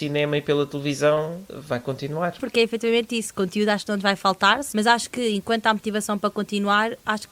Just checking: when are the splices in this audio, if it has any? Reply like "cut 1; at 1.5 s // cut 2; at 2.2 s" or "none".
cut 1; at 1.5 s // cut 2; at 2.4 s // cut 3; at 4.6 s